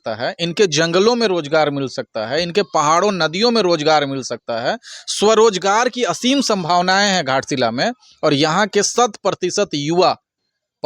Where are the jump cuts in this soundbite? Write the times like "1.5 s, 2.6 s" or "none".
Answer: none